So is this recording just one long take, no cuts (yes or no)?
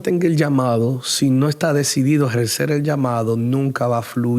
yes